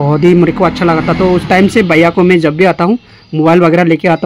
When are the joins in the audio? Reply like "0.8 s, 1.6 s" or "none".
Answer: none